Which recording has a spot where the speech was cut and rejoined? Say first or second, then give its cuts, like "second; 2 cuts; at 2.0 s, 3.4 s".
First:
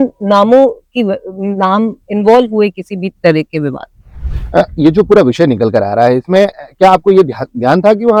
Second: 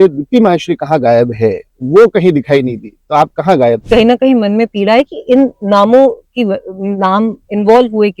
second; 1 cut; at 3.8 s